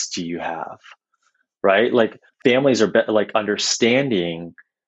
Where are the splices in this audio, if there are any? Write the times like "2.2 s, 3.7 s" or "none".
2.2 s